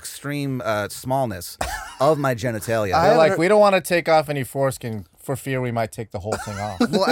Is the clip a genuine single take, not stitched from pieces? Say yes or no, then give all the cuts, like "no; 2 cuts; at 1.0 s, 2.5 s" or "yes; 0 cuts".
yes; 0 cuts